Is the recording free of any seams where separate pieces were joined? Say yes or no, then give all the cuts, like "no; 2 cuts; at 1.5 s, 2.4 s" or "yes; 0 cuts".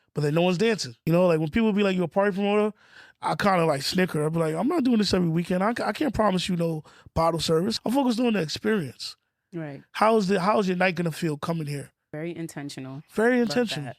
no; 3 cuts; at 0.9 s, 7.8 s, 12.1 s